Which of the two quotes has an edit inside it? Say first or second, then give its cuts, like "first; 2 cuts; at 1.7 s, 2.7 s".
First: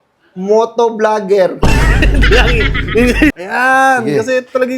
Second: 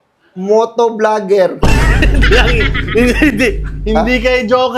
first; 1 cut; at 3.3 s